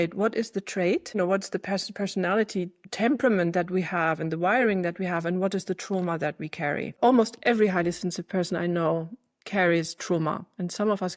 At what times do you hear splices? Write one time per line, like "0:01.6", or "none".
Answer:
0:01.2
0:02.8
0:06.9